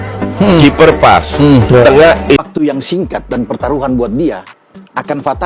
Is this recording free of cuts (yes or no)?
no